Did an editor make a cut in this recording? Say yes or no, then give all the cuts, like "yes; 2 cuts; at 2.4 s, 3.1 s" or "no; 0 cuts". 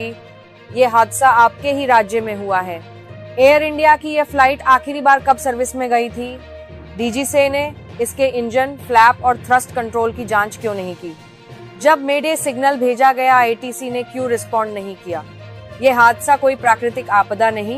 no; 0 cuts